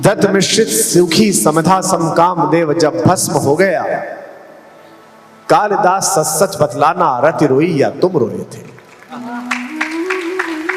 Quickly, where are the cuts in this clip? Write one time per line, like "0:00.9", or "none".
none